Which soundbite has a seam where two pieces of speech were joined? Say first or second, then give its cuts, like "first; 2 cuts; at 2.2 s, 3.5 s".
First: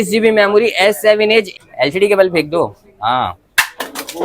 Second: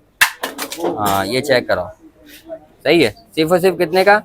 first; 1 cut; at 1.5 s